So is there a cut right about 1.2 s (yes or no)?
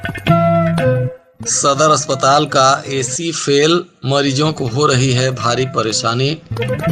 yes